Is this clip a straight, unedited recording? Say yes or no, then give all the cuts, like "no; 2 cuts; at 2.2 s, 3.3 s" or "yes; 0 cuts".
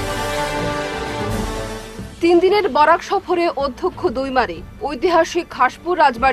yes; 0 cuts